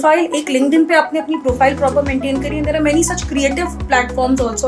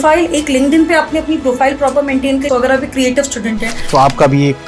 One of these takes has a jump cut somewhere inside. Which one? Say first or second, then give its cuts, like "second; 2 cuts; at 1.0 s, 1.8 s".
second; 2 cuts; at 2.5 s, 3.7 s